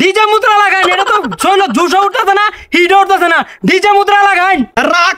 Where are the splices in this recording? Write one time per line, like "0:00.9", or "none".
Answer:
none